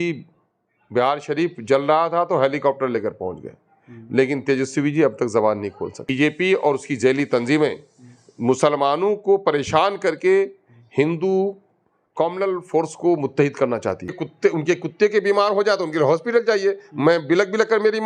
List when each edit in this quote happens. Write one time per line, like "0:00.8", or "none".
0:06.1
0:14.3